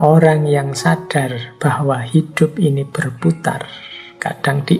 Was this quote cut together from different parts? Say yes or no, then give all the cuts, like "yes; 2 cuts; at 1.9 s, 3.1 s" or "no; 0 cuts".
no; 0 cuts